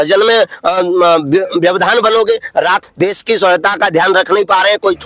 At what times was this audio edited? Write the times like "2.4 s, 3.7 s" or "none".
2.9 s